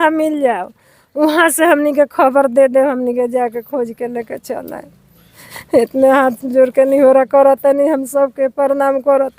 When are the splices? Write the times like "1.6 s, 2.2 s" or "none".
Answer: none